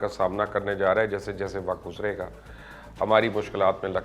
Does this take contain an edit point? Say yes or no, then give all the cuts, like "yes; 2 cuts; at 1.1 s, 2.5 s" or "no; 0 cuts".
no; 0 cuts